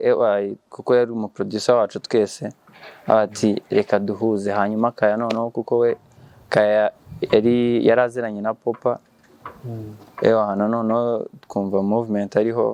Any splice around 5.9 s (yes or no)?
no